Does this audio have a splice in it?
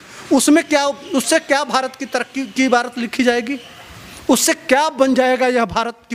no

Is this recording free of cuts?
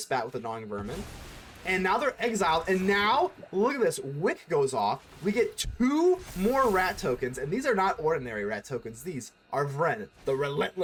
yes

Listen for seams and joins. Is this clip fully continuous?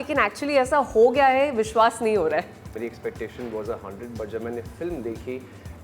yes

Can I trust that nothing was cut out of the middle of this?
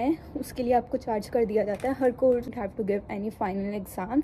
no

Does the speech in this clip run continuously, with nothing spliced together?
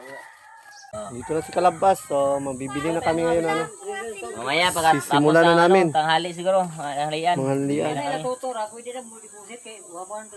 no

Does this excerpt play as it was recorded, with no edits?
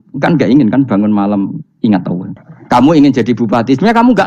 no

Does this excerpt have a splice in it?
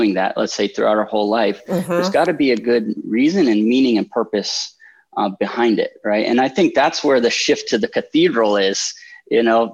no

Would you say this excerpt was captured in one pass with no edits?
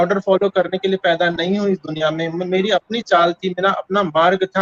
yes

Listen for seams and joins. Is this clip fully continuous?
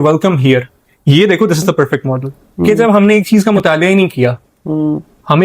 no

